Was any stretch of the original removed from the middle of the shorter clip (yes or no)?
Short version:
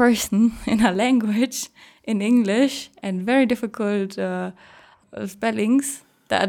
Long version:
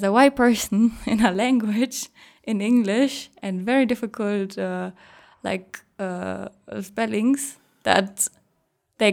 yes